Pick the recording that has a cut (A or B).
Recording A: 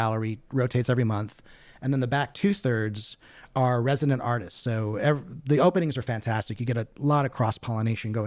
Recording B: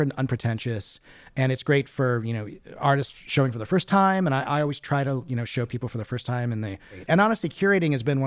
B